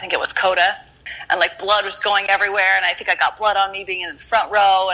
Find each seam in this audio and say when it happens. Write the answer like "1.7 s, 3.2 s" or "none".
1.1 s